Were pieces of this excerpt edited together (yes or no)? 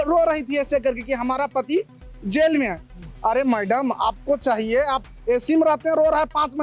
no